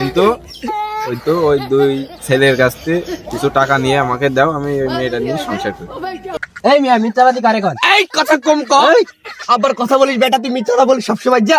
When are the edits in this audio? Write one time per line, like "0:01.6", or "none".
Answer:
0:06.4